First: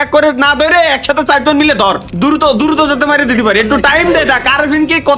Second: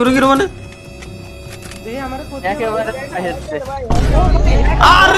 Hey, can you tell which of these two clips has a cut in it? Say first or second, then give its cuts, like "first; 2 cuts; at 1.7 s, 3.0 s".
first; 1 cut; at 2.1 s